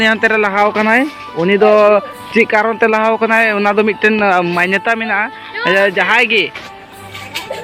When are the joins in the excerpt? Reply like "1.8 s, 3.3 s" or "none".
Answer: none